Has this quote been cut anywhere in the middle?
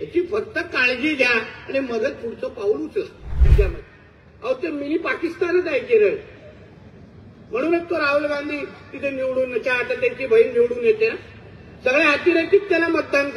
yes; 1 cut; at 3.5 s

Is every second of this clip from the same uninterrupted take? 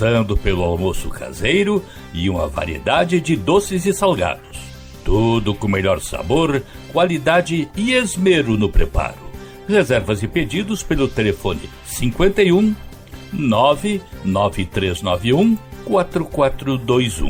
yes; 0 cuts

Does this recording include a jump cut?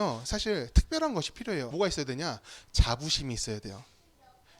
yes; 1 cut; at 1.7 s

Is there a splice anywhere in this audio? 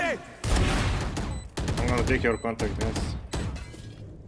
yes; 1 cut; at 1.0 s

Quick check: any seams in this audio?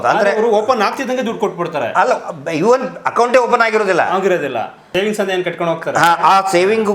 yes; 1 cut; at 4.8 s

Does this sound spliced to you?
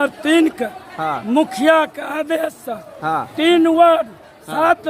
no; 0 cuts

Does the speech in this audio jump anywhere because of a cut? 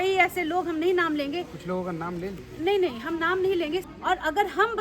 yes; 1 cut; at 3.9 s

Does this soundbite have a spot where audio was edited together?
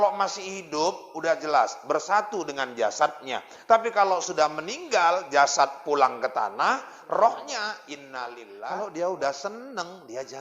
yes; 1 cut; at 8.6 s

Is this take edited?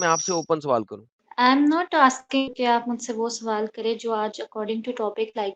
no; 0 cuts

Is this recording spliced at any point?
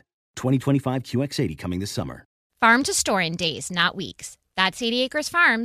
yes; 1 cut; at 2.4 s

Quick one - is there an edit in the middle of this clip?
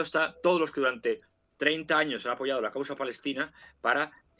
no; 0 cuts

